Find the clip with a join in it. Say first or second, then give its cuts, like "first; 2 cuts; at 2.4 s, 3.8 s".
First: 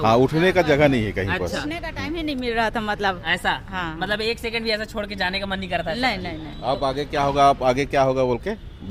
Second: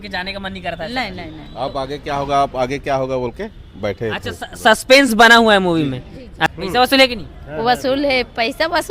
second; 1 cut; at 6.4 s